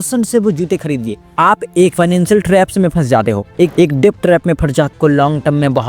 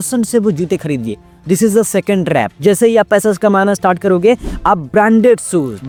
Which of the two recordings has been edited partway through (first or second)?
first